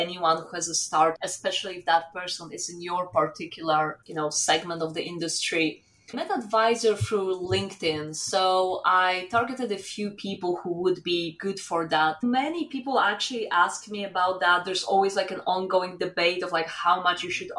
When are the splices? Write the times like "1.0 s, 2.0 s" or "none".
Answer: 1.2 s, 4.0 s, 6.1 s, 12.2 s